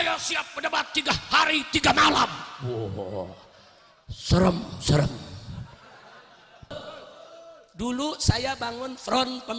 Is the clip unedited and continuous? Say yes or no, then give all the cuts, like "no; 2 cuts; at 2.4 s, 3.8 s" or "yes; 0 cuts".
no; 1 cut; at 6.7 s